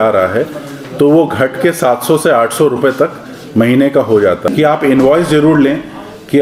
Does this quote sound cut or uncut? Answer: cut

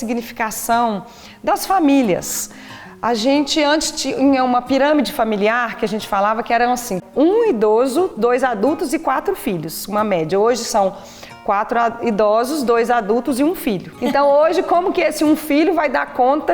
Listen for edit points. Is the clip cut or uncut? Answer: cut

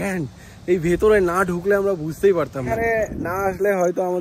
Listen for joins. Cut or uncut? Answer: cut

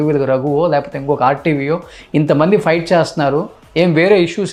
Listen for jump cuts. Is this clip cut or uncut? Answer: uncut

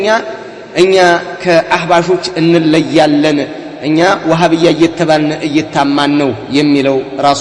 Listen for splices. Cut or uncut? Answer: uncut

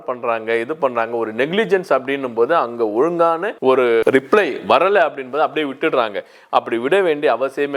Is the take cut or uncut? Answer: uncut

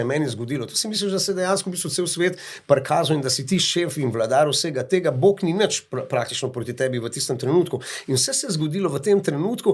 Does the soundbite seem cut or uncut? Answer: uncut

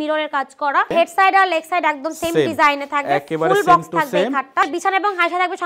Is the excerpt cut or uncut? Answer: cut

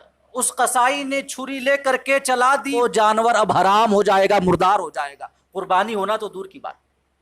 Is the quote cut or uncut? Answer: cut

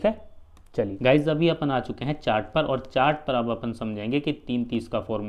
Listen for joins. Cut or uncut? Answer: cut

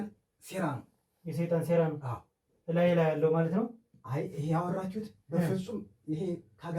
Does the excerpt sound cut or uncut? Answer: uncut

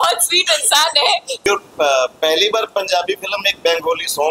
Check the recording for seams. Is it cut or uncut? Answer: cut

